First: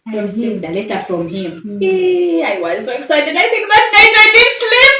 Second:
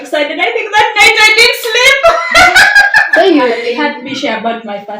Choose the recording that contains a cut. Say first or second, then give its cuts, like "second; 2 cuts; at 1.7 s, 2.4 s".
second; 1 cut; at 3.6 s